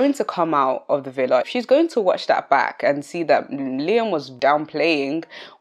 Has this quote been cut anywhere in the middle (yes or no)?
yes